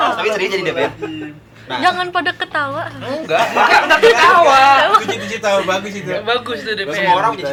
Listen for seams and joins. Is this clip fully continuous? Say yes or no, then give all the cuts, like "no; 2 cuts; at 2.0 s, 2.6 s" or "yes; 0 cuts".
yes; 0 cuts